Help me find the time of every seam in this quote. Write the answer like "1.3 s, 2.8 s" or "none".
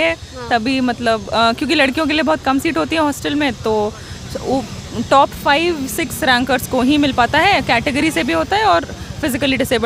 none

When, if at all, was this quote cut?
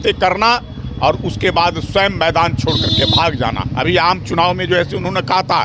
3.7 s

